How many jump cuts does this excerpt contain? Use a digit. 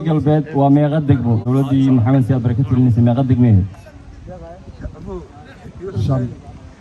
1